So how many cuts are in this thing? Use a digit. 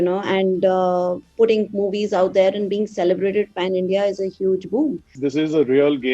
1